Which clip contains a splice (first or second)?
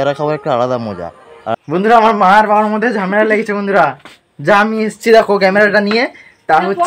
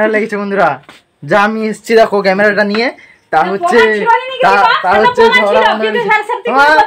first